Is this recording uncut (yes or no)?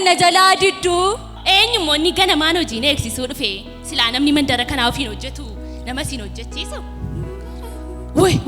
no